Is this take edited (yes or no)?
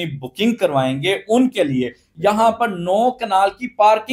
yes